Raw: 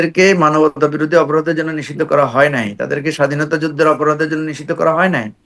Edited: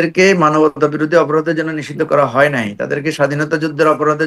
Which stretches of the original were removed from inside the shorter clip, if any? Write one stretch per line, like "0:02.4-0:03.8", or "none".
none